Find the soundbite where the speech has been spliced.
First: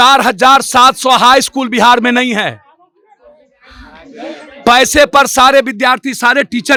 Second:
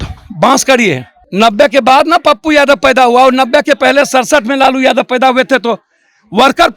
second; 1 cut; at 1.1 s

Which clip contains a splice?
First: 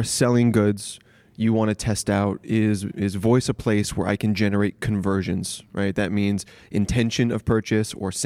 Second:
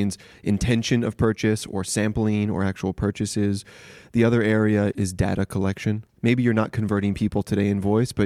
second; 2 cuts; at 4.9 s, 6.1 s

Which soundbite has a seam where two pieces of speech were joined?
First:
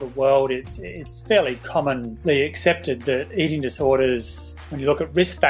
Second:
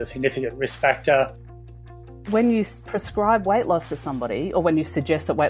second; 1 cut; at 1.7 s

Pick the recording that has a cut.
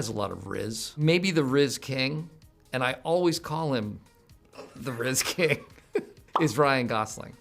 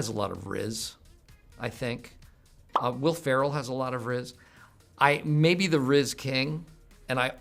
first; 2 cuts; at 0.9 s, 6.2 s

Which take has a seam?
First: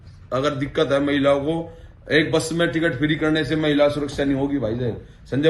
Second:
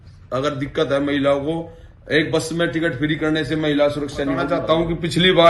second; 1 cut; at 4.5 s

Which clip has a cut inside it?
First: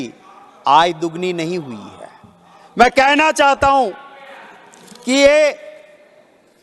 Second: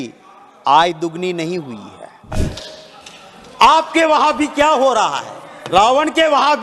second; 1 cut; at 2.3 s

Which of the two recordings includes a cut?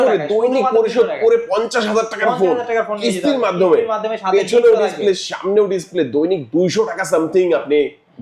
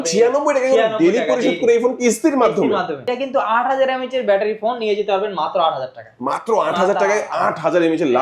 second; 1 cut; at 3.1 s

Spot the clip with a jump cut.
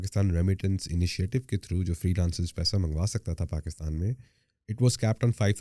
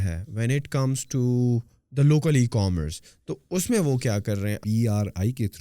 second; 1 cut; at 4.6 s

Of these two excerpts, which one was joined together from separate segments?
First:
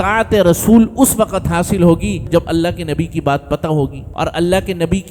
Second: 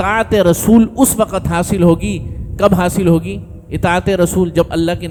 first; 2 cuts; at 2.3 s, 4.0 s

